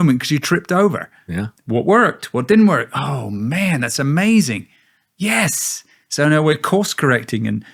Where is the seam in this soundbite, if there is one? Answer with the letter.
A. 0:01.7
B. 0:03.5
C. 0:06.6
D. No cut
D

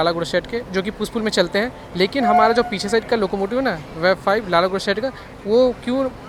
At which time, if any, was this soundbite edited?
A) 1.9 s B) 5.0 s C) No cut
C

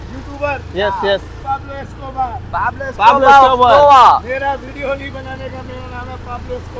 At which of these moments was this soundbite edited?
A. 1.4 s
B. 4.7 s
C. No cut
A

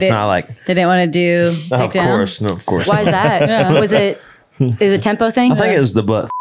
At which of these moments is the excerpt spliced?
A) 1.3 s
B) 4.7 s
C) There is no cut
C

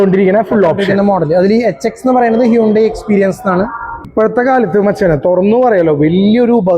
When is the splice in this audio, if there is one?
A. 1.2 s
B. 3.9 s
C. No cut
B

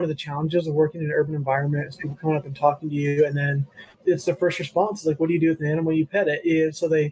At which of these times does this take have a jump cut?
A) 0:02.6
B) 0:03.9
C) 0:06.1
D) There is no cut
B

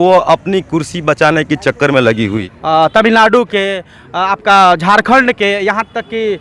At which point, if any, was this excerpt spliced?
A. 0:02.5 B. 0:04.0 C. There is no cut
A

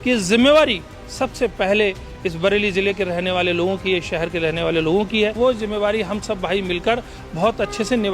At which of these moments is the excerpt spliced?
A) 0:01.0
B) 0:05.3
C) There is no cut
B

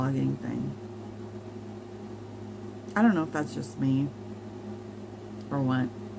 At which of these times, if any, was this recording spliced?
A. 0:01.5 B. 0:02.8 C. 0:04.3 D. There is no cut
D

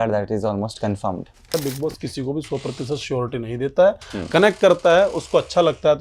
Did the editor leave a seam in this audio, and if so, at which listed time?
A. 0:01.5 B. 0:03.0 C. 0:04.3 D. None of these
A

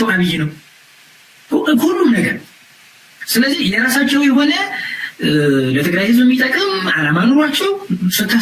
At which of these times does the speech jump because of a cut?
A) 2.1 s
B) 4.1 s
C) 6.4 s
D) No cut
D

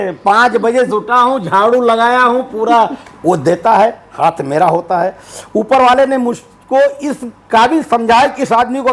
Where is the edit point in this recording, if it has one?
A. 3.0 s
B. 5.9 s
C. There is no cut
A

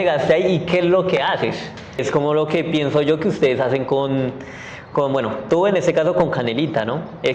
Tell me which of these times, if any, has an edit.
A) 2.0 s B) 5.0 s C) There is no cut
A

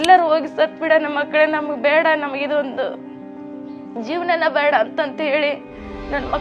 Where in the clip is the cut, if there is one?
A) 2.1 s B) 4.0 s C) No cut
C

